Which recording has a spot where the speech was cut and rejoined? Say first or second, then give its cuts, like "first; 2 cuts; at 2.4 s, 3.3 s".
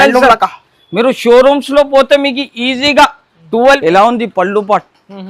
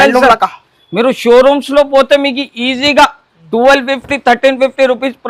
first; 1 cut; at 3.8 s